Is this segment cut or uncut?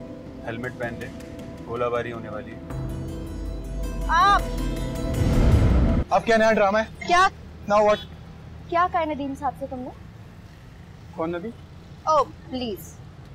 uncut